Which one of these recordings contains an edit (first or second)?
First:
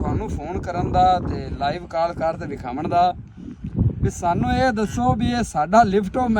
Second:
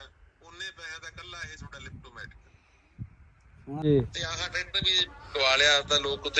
second